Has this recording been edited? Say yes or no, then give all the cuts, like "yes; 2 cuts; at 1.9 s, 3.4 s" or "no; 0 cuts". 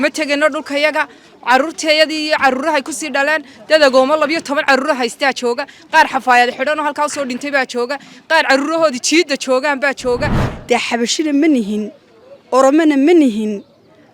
yes; 1 cut; at 10.5 s